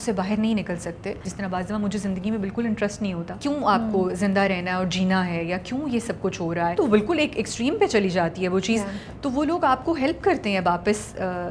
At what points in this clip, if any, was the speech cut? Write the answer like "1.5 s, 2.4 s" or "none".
1.3 s, 3.3 s, 6.8 s